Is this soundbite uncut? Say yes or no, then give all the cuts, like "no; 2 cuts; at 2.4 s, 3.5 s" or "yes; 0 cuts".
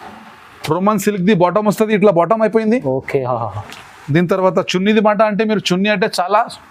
yes; 0 cuts